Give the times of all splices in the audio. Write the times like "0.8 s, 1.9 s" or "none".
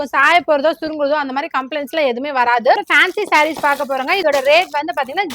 2.8 s, 4.2 s